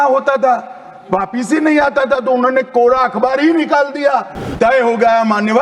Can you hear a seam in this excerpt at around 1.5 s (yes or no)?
no